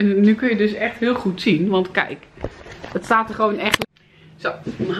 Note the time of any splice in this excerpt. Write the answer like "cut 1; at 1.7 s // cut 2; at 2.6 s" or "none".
cut 1; at 3.8 s